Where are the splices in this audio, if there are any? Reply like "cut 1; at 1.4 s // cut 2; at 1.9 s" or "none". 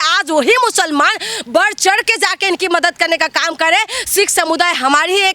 none